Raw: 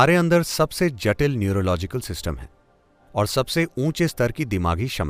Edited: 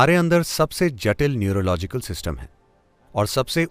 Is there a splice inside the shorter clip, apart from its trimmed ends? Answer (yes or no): no